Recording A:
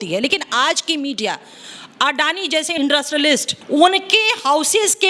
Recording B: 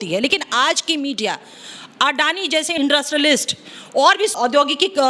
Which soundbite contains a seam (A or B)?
A